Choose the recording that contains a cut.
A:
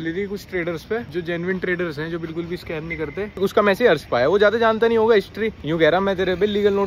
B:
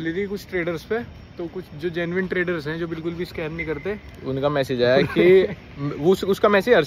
A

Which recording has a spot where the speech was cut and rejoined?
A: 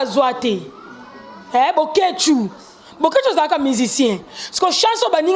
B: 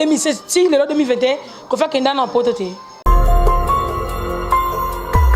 B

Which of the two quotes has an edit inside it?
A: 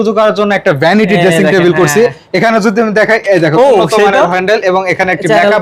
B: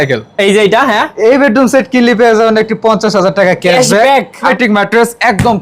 B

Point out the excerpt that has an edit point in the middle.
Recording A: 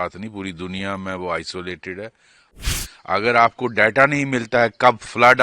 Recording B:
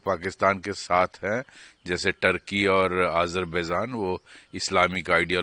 A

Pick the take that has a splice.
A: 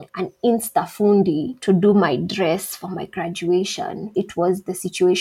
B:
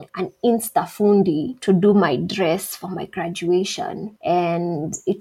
A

